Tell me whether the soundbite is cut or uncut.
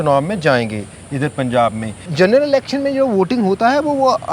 cut